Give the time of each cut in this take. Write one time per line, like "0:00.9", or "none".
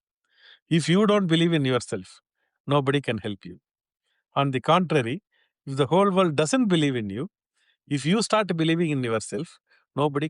none